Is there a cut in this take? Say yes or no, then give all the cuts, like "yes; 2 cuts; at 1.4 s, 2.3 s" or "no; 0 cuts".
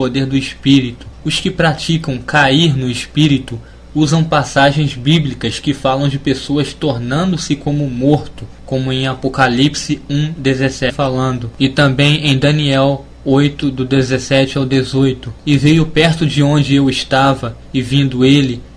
no; 0 cuts